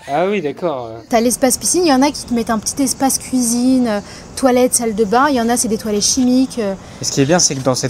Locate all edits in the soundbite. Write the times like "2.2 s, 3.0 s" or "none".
1.0 s